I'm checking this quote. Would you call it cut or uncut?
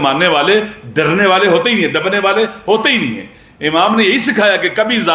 uncut